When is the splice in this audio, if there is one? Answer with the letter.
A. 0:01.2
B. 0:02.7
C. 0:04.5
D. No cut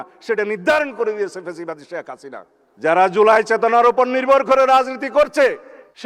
B